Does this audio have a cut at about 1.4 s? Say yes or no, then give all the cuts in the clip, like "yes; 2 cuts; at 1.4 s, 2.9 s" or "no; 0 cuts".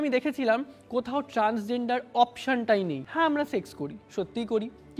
no; 1 cut; at 3.0 s